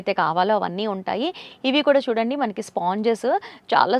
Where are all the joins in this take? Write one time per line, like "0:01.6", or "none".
none